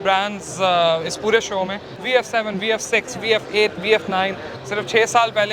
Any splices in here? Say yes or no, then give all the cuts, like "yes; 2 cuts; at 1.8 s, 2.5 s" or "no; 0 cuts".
yes; 2 cuts; at 1.9 s, 4.5 s